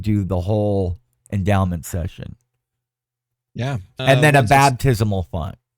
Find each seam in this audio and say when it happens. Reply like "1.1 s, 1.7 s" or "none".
3.9 s